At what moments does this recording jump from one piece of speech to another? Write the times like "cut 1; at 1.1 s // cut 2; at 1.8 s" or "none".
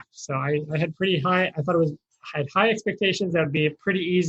none